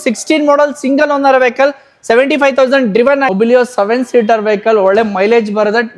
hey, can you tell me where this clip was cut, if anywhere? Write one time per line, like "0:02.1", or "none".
0:03.3